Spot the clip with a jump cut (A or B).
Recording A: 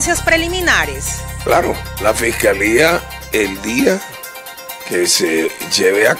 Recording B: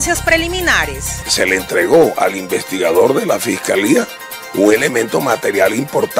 B